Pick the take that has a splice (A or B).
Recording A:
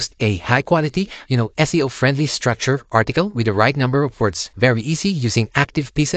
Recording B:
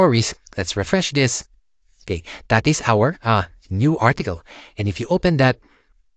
A